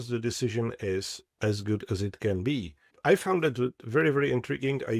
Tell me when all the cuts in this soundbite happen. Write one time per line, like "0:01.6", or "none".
0:02.9